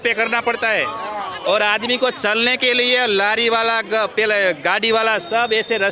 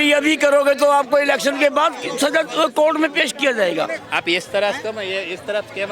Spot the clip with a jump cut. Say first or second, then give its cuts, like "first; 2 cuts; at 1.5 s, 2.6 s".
second; 1 cut; at 4.0 s